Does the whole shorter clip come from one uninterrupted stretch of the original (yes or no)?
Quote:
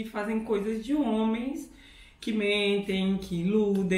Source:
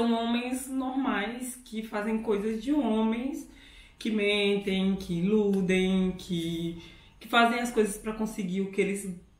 yes